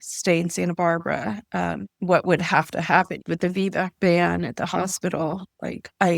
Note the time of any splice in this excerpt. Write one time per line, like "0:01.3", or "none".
0:03.2